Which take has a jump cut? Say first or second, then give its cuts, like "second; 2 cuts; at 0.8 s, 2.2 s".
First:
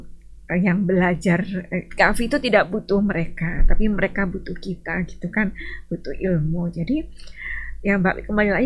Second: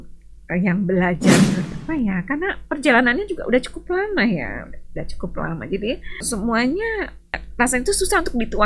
second; 3 cuts; at 1.7 s, 6.2 s, 7.5 s